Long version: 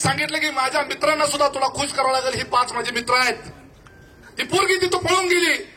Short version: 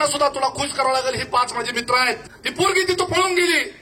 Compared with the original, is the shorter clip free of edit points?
no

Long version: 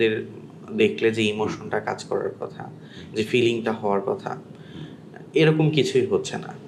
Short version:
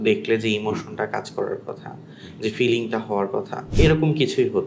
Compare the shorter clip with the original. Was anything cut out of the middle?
yes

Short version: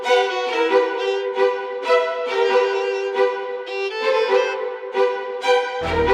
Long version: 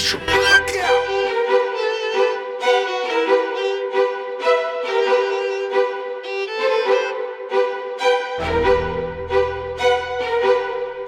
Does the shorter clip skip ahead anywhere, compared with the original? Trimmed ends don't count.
no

